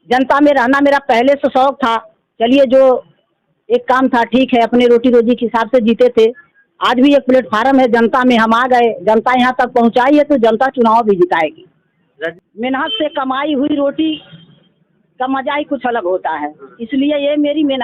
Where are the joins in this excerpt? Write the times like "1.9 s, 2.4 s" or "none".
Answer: 12.2 s